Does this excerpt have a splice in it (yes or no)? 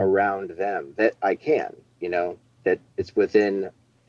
yes